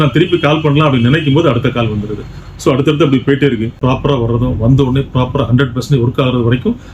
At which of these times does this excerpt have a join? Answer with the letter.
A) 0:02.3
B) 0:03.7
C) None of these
B